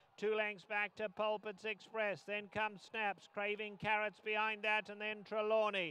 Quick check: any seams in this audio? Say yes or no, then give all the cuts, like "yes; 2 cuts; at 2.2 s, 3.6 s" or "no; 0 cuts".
no; 0 cuts